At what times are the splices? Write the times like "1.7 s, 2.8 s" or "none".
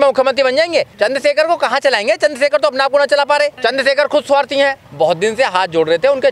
0.9 s, 3.6 s, 4.9 s

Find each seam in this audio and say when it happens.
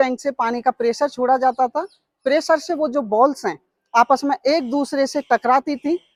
none

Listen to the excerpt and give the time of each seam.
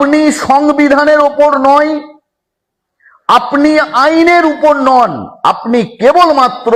none

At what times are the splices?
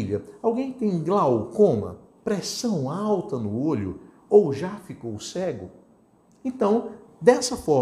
none

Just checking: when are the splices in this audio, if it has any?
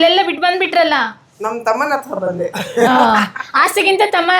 none

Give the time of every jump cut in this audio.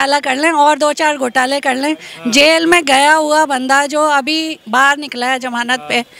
none

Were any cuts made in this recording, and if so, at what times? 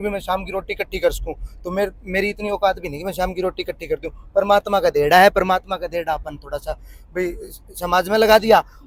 none

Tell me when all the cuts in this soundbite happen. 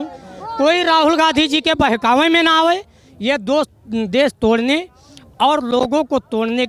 none

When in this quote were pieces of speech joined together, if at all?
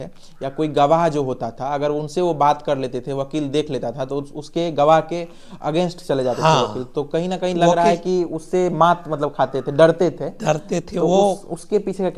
none

